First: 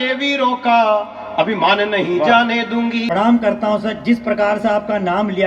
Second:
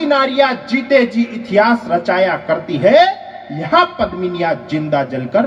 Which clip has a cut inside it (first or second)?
first